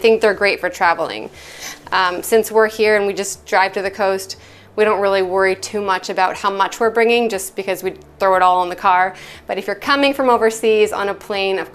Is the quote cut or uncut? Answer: uncut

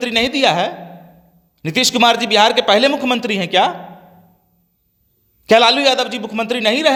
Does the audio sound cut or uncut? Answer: uncut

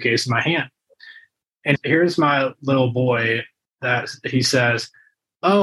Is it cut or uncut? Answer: uncut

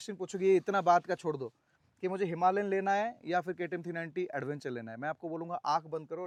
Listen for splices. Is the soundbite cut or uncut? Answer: uncut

